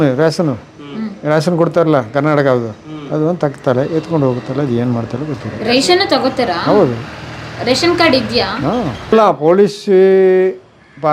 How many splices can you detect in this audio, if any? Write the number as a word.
one